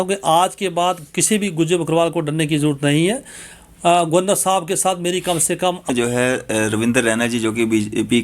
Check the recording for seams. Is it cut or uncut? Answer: cut